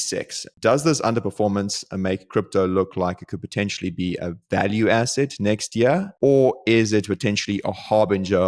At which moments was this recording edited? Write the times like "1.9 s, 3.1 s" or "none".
none